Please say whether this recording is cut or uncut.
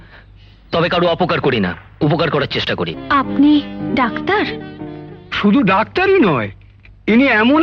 cut